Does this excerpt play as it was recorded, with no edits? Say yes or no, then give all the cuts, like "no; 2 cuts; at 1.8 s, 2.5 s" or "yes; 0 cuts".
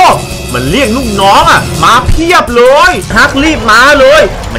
no; 1 cut; at 3.1 s